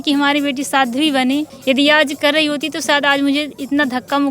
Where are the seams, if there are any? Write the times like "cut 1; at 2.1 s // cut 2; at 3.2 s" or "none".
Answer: cut 1; at 1.5 s